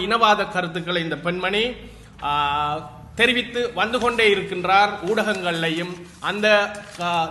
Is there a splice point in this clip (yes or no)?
no